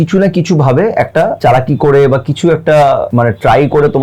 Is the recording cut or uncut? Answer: cut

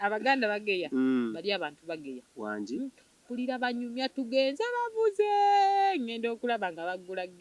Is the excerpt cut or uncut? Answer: uncut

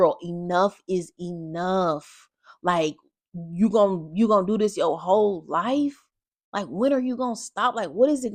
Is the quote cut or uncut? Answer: uncut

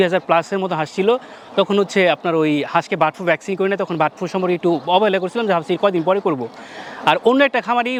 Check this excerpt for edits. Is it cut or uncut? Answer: uncut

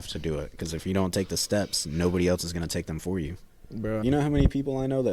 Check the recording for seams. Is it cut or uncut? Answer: cut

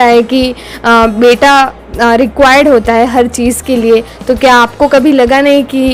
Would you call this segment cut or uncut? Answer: uncut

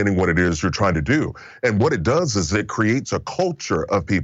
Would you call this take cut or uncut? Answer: uncut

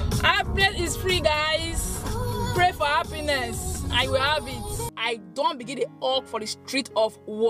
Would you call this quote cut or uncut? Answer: cut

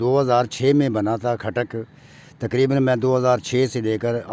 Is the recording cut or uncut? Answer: uncut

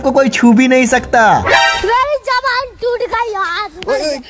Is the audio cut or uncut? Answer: cut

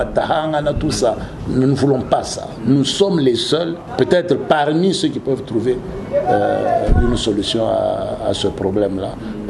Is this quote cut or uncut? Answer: cut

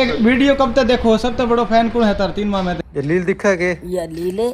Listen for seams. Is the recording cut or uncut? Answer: cut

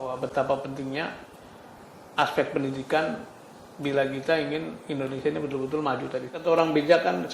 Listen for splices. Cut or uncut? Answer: cut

